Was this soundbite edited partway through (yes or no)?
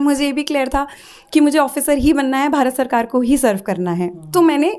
no